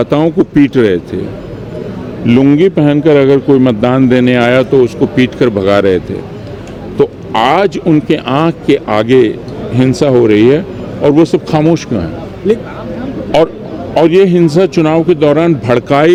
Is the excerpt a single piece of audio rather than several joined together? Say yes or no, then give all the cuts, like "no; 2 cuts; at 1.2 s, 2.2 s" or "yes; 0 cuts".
yes; 0 cuts